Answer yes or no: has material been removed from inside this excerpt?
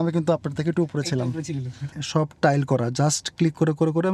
yes